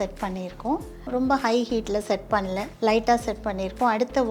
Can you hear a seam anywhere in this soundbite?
yes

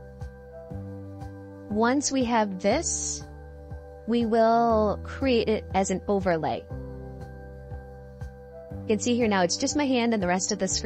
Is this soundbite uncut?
no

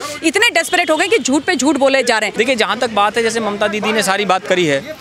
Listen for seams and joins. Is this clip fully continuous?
no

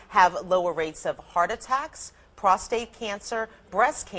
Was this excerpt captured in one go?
yes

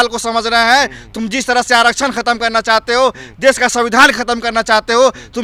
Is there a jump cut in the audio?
no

